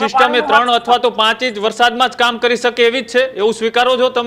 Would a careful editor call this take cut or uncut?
uncut